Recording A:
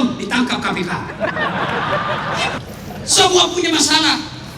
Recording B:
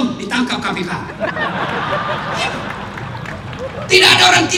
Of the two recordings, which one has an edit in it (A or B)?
A